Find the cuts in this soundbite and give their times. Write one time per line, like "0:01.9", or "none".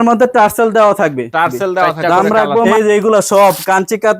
0:02.7

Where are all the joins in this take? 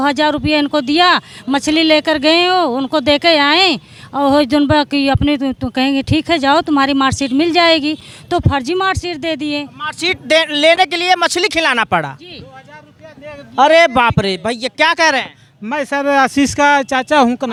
none

